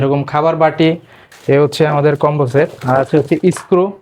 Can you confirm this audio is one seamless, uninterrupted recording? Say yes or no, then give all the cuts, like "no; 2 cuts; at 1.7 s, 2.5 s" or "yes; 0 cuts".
no; 2 cuts; at 1.2 s, 2.8 s